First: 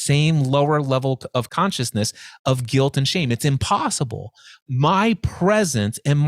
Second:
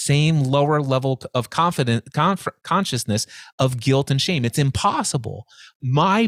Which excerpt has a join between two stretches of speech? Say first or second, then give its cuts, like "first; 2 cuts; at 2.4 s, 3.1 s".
first; 1 cut; at 1.5 s